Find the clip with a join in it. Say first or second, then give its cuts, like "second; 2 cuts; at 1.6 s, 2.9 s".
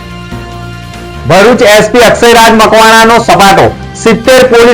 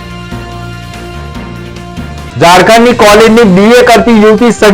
first; 1 cut; at 1.2 s